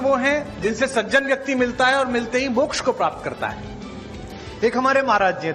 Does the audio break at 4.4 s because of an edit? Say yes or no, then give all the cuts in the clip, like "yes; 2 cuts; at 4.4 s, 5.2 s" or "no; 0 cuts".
no; 1 cut; at 3.0 s